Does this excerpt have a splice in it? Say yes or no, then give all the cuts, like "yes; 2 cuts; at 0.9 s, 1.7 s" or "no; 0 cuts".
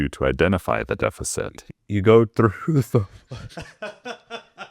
yes; 1 cut; at 0.9 s